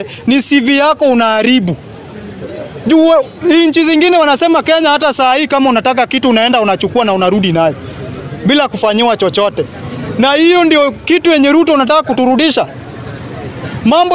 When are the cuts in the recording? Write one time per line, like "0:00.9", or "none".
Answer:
none